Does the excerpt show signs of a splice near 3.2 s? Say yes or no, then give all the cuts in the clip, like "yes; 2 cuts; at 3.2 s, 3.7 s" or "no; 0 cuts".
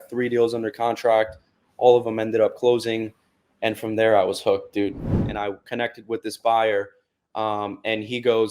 no; 1 cut; at 5.2 s